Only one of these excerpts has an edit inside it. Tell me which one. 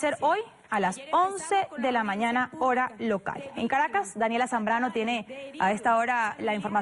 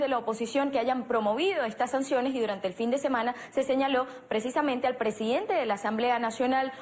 second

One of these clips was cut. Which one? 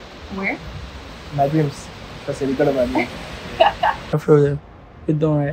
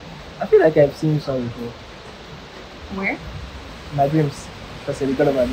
first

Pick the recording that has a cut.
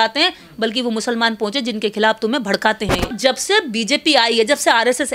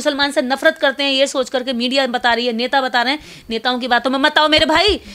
first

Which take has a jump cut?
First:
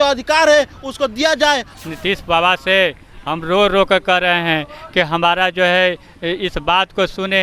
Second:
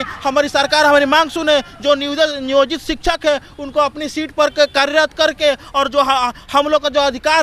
first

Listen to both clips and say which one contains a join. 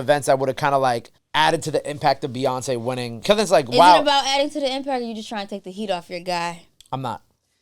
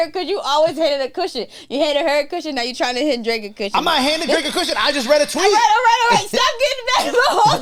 first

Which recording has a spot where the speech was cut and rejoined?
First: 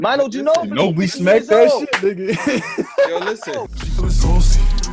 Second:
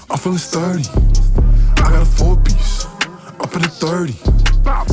first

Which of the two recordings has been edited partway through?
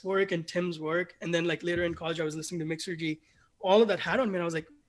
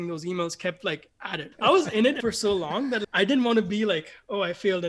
second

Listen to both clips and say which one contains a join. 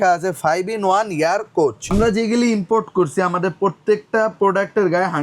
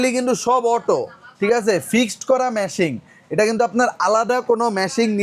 first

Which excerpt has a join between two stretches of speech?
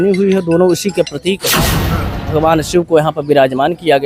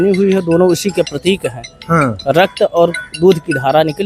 first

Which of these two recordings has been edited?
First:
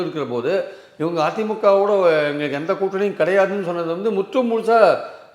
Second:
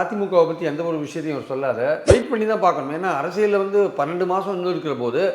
second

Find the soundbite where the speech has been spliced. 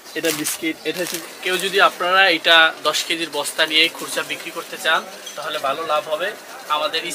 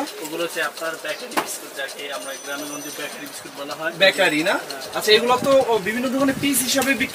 first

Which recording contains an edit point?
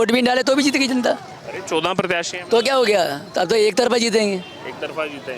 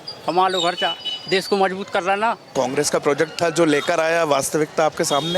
second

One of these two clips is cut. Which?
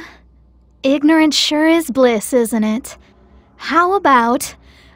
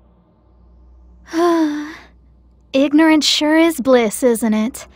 second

